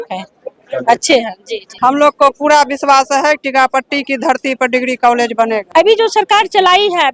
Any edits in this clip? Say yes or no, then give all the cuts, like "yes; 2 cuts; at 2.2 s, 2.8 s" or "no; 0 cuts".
yes; 2 cuts; at 1.7 s, 5.6 s